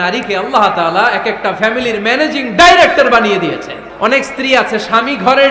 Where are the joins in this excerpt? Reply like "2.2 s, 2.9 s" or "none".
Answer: 3.8 s